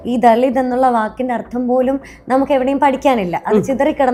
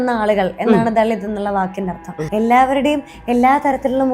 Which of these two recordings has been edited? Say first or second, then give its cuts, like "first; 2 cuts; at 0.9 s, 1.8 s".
second; 1 cut; at 2.1 s